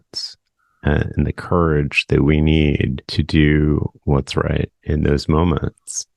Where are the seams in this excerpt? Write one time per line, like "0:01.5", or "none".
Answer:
0:03.0